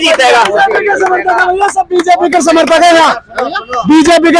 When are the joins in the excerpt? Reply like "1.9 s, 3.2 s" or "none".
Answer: none